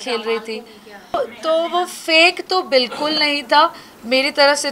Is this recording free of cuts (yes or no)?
no